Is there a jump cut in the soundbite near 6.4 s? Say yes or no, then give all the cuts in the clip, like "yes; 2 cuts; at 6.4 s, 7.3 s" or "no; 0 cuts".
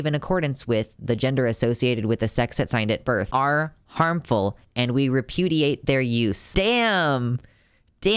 yes; 2 cuts; at 3.3 s, 6.4 s